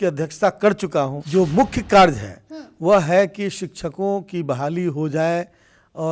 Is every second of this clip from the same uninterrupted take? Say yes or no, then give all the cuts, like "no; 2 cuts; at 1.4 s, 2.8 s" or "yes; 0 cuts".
no; 1 cut; at 1.2 s